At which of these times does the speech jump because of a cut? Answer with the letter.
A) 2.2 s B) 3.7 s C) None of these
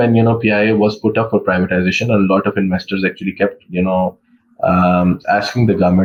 C